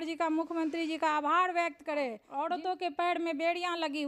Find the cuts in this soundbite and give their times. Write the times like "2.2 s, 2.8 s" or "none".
2.2 s